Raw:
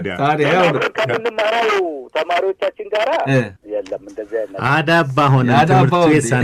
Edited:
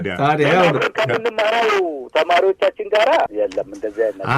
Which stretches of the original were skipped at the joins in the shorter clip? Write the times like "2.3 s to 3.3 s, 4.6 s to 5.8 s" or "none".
3.3 s to 3.6 s